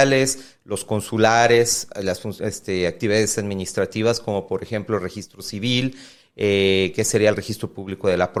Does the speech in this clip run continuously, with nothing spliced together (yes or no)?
yes